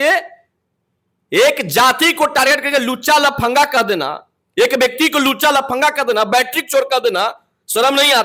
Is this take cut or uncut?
uncut